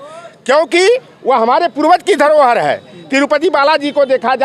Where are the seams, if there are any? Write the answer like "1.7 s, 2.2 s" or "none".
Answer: none

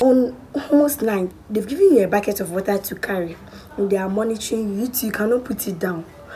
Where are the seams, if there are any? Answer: 1.3 s

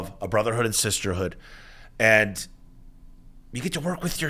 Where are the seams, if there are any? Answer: none

